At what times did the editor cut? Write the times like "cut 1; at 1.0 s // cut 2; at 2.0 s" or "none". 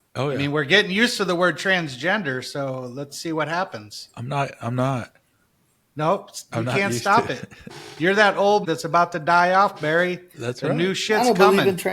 none